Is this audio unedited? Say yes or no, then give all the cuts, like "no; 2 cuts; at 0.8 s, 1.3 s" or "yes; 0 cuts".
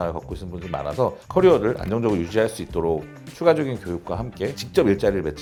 yes; 0 cuts